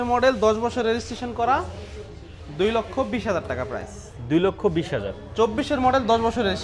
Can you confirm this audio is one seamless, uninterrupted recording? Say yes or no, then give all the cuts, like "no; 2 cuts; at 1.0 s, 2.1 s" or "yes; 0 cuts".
yes; 0 cuts